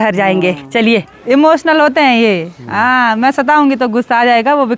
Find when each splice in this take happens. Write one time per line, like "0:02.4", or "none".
0:01.1